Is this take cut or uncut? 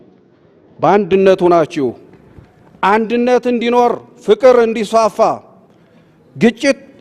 uncut